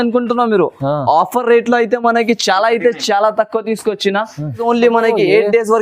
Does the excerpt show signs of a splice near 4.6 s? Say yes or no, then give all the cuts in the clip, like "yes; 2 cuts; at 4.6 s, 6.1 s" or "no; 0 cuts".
yes; 1 cut; at 4.6 s